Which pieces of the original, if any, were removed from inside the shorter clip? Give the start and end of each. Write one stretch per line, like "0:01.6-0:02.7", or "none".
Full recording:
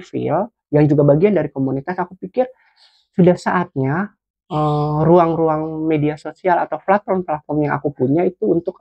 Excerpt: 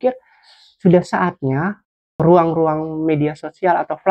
0:04.5-0:05.0